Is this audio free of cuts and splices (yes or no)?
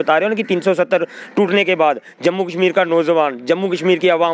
yes